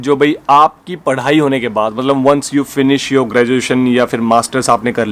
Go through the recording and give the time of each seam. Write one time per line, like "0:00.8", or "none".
none